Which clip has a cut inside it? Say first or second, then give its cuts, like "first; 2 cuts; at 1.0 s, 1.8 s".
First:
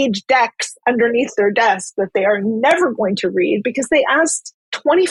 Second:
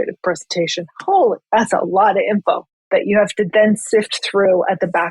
second; 1 cut; at 2.7 s